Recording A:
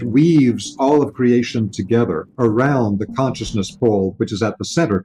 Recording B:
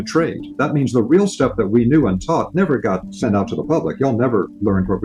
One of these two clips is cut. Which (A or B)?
B